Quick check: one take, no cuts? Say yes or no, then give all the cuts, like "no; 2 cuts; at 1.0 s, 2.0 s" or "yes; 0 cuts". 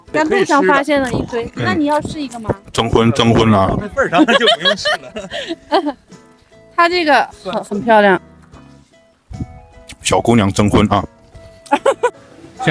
yes; 0 cuts